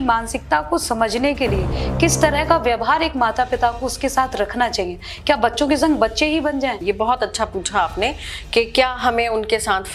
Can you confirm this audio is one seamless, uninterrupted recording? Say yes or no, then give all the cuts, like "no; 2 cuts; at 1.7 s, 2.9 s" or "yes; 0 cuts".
no; 1 cut; at 6.8 s